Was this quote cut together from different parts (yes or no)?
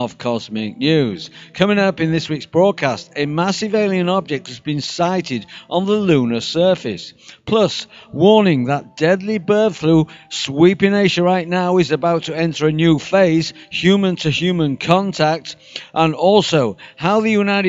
yes